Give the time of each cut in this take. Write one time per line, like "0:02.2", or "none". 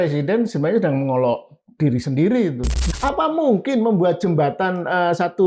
0:02.8